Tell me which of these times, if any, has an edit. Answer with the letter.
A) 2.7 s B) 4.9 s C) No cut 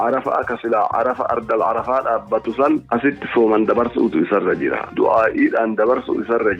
B